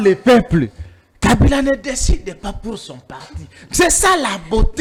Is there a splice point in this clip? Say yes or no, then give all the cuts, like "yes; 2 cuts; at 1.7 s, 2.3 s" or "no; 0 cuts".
no; 0 cuts